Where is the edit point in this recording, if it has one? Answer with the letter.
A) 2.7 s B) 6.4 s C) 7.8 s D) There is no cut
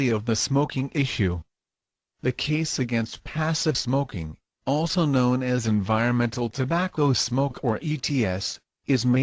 C